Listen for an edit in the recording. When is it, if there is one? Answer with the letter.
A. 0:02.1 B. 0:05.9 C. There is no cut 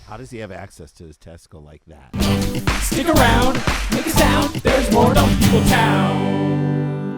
A